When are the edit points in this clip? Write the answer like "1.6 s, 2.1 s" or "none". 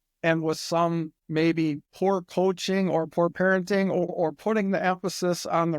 1.2 s, 1.9 s, 4.1 s